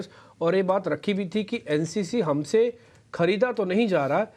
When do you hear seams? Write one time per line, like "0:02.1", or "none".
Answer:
none